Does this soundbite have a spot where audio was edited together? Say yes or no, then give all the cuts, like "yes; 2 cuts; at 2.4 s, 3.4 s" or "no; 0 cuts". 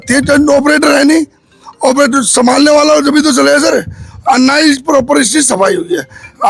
no; 0 cuts